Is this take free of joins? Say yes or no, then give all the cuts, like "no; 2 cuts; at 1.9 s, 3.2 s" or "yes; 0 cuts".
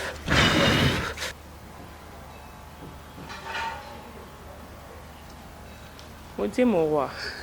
no; 1 cut; at 1.3 s